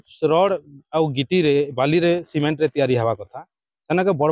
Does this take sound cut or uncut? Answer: uncut